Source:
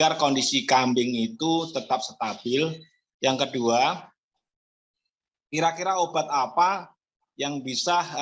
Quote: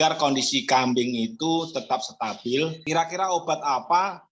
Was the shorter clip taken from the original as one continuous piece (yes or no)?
no